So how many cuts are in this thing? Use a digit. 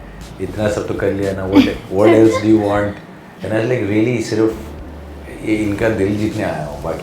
1